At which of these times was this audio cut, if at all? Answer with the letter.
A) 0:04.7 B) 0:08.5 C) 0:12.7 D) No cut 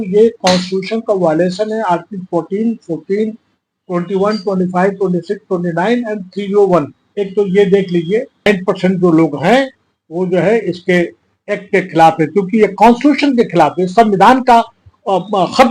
B